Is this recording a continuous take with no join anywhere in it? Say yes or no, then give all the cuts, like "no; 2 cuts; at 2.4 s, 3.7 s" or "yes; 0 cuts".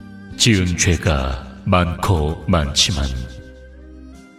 yes; 0 cuts